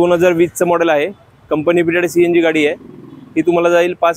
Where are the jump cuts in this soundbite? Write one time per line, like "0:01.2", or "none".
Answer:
none